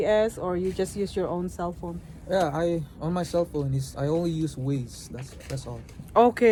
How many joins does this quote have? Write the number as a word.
zero